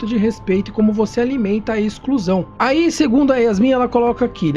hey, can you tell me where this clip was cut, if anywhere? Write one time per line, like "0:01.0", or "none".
0:02.5